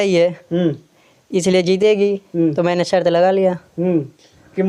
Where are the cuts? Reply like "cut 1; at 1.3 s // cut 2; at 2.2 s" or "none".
none